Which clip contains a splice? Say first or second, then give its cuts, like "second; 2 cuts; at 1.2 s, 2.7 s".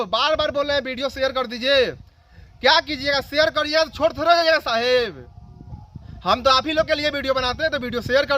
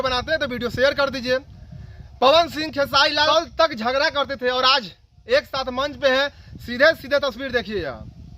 second; 1 cut; at 3.3 s